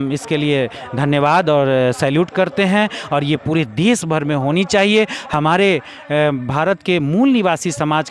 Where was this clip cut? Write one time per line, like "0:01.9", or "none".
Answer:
none